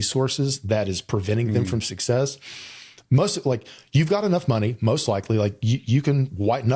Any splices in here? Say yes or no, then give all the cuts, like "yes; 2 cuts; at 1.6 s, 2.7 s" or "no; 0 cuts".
no; 0 cuts